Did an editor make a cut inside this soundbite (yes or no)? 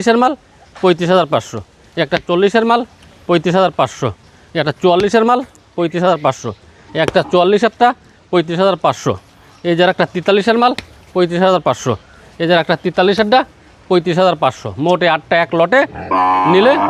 no